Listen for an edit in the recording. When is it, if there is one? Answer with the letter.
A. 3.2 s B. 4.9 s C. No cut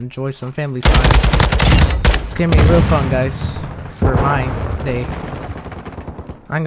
C